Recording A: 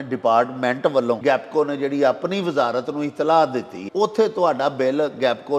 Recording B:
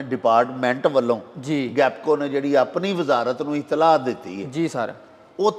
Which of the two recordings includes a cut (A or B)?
A